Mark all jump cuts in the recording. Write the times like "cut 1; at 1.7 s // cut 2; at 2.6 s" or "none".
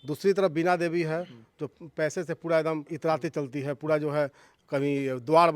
cut 1; at 1.7 s // cut 2; at 2.9 s